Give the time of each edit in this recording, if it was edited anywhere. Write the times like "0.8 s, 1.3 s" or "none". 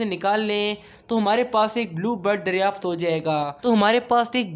3.5 s